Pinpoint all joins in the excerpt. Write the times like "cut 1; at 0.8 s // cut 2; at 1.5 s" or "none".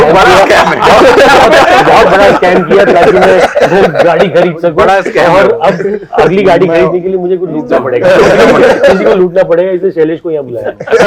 none